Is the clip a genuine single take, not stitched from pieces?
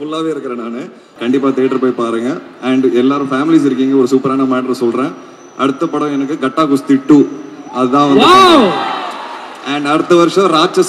no; 1 cut; at 1.1 s

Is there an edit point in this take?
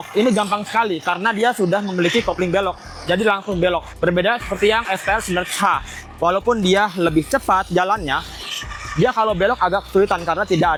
no; 0 cuts

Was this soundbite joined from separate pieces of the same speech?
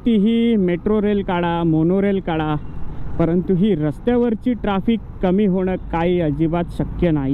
no; 0 cuts

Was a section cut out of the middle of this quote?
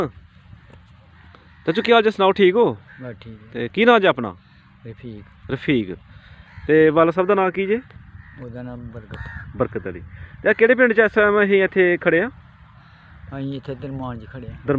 no; 0 cuts

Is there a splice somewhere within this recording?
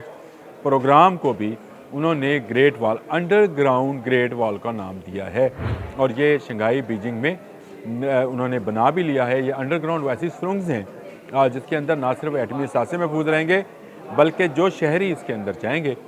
no; 0 cuts

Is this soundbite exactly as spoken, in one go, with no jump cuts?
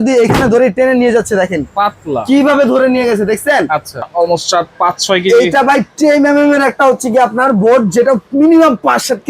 no; 1 cut; at 4.1 s

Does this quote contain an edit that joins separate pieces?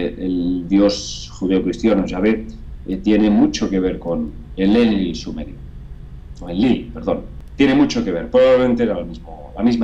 yes; 1 cut; at 7.4 s

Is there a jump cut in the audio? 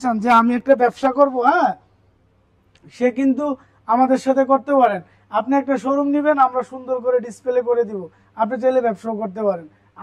no; 0 cuts

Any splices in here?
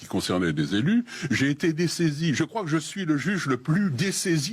no; 0 cuts

